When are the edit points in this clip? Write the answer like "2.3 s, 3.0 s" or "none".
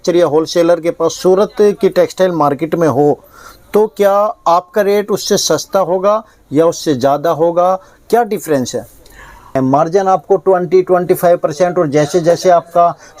9.5 s